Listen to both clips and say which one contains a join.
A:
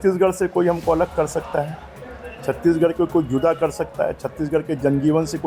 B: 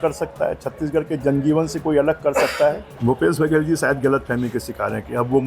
B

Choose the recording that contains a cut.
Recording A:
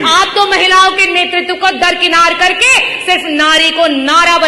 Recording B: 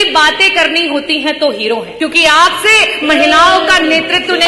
B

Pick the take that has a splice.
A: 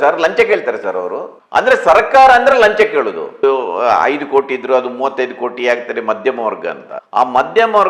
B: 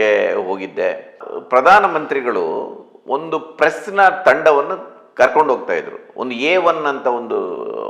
A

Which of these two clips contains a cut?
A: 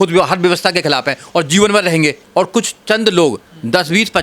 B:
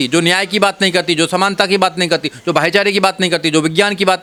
A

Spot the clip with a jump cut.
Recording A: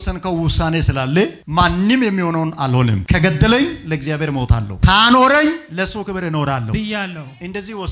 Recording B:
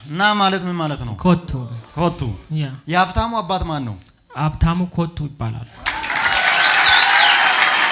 A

